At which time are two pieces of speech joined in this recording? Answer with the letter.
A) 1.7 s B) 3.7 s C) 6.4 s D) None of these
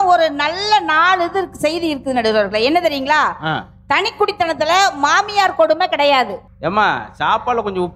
C